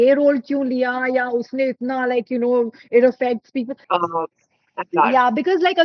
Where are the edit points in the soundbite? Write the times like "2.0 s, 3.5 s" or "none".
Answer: 3.8 s